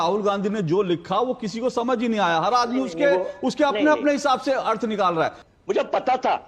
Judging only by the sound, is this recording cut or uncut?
cut